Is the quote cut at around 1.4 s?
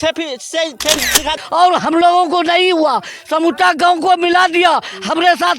yes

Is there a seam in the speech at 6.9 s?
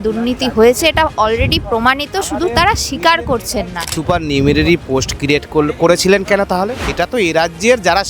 yes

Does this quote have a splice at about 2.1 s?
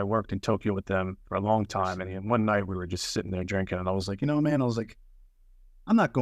yes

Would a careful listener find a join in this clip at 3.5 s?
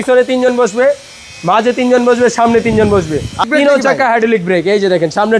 yes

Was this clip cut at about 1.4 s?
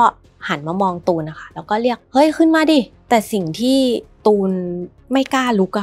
no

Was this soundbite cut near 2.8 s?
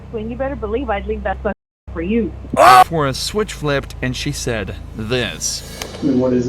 yes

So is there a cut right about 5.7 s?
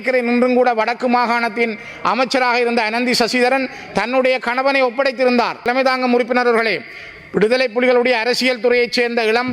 yes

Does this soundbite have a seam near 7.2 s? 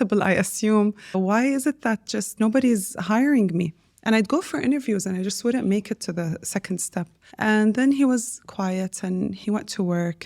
yes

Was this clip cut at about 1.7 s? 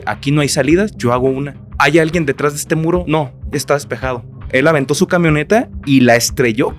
yes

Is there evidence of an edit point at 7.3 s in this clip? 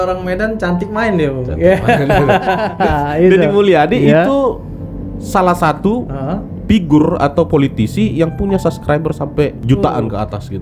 no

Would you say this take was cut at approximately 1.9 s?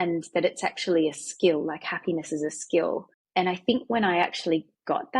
no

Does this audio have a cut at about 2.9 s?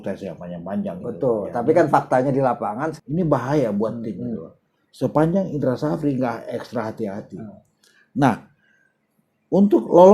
yes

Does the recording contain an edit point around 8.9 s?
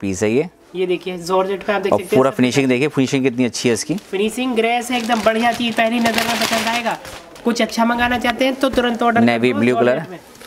no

